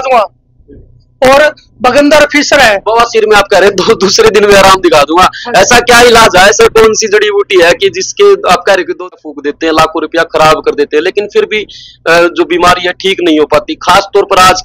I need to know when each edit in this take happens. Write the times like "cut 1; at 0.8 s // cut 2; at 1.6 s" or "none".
cut 1; at 9.1 s